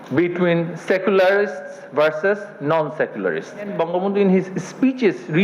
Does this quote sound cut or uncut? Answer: cut